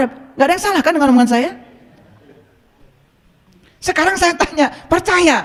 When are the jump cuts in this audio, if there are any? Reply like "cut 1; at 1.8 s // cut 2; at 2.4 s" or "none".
none